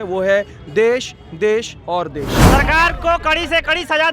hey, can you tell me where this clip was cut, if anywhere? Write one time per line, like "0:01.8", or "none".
0:02.4